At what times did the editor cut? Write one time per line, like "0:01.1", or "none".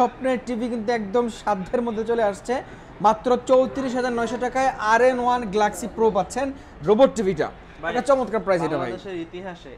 none